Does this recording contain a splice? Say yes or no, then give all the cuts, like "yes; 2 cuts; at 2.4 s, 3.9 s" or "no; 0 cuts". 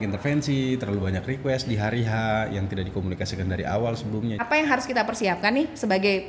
yes; 1 cut; at 4.4 s